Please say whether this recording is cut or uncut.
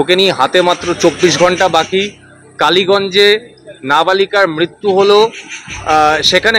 uncut